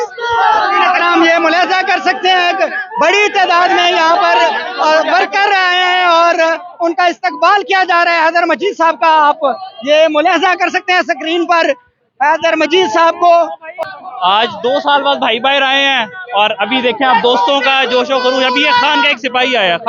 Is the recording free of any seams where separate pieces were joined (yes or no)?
no